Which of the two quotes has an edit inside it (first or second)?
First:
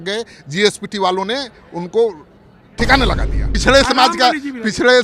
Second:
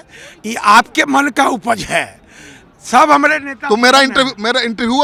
first